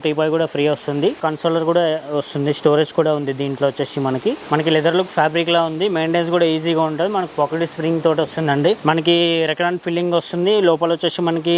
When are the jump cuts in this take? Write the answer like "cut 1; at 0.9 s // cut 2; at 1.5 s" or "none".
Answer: cut 1; at 1.2 s // cut 2; at 4.4 s // cut 3; at 8.8 s